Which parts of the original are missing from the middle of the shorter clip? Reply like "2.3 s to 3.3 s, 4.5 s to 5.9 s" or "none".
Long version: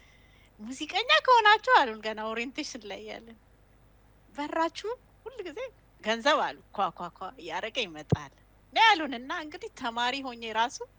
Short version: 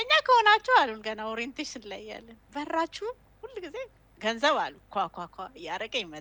3.3 s to 4.2 s